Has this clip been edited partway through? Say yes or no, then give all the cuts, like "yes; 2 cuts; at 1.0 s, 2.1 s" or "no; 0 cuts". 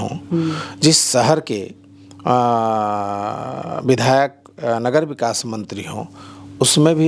no; 0 cuts